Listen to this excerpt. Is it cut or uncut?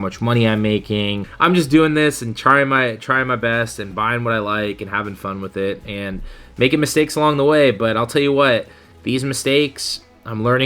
cut